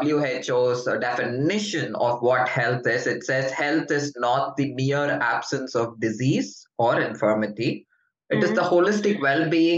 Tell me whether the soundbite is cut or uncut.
uncut